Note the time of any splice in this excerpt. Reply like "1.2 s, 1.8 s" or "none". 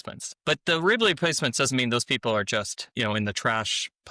2.8 s